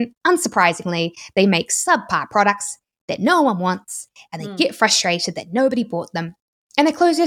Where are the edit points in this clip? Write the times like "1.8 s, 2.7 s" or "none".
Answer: none